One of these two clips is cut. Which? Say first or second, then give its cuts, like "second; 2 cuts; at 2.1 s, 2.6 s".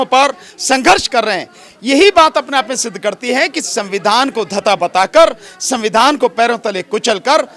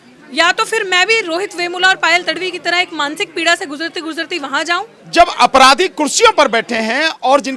second; 1 cut; at 5.0 s